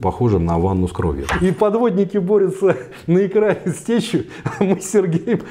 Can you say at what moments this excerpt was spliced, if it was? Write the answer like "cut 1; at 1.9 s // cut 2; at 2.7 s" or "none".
cut 1; at 1.3 s